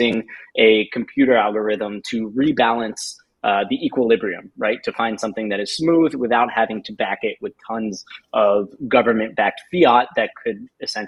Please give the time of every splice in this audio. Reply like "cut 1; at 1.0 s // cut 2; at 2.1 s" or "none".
none